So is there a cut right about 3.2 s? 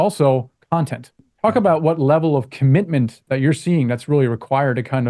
yes; 2 cuts; at 1.3 s, 3.2 s

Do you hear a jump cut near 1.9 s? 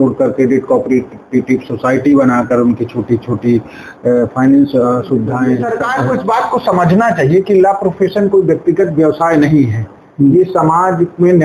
no; 1 cut; at 5.6 s

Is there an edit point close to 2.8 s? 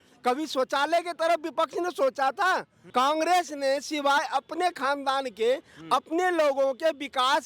yes; 1 cut; at 2.8 s

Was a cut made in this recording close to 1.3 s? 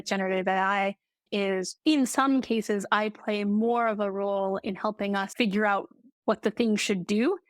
yes; 1 cut; at 1.3 s

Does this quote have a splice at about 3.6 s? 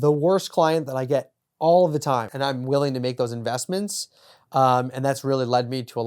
no; 1 cut; at 2.3 s

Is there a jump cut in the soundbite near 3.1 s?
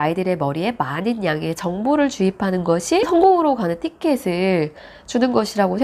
yes; 1 cut; at 3.1 s

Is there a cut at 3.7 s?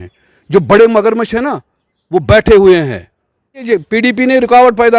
yes; 1 cut; at 3.7 s

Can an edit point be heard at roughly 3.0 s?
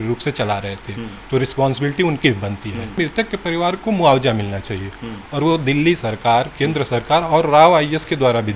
yes; 1 cut; at 3.0 s

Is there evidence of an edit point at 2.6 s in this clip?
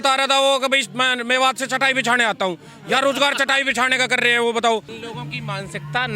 no; 1 cut; at 5.0 s

